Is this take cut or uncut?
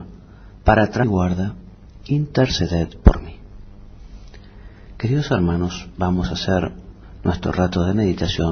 uncut